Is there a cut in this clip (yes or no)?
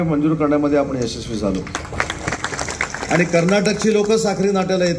yes